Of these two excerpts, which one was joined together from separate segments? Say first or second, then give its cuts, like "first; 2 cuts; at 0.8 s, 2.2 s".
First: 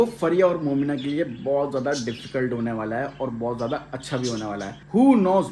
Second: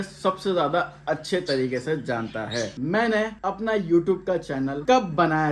second; 1 cut; at 2.7 s